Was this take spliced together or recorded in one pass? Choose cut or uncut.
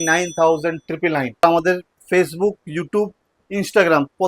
cut